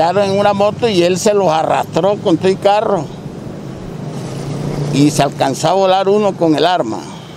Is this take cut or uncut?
uncut